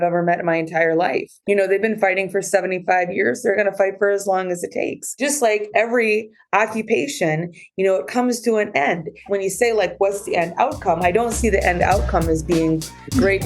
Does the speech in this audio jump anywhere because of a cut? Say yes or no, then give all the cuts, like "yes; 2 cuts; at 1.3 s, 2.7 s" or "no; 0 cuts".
yes; 3 cuts; at 1.3 s, 5.0 s, 9.3 s